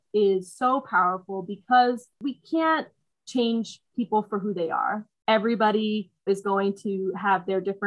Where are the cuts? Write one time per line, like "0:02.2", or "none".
0:02.2
0:05.1
0:06.3